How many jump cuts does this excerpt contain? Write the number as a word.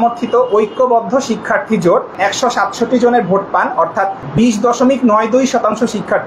two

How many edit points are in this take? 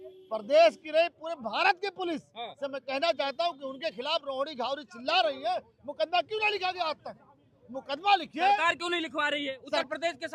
zero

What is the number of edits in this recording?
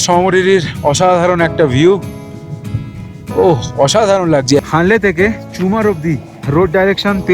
two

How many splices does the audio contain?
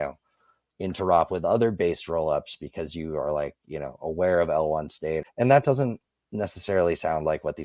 one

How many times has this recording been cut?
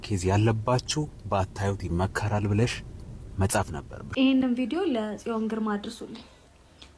one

